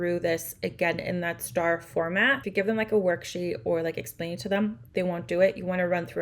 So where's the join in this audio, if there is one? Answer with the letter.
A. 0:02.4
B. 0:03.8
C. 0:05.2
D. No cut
A